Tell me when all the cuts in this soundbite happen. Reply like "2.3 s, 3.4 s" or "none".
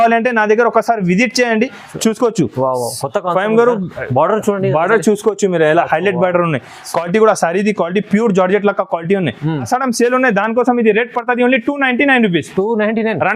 9.7 s